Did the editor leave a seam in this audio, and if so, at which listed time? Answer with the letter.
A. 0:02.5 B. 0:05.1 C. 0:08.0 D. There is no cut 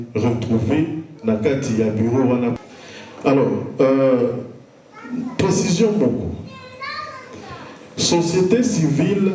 D